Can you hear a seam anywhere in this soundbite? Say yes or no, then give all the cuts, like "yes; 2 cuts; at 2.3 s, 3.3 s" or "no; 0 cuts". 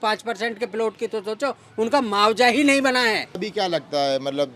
yes; 1 cut; at 3.4 s